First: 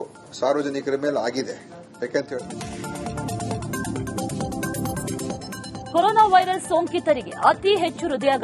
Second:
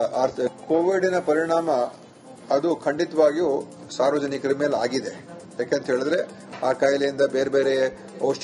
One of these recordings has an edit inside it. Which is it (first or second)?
first